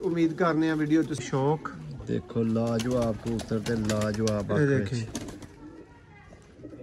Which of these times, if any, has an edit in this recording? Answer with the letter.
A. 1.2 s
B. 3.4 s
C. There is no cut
A